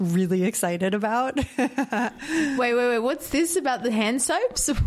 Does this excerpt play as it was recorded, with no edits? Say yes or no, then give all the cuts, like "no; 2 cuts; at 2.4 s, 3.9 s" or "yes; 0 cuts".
yes; 0 cuts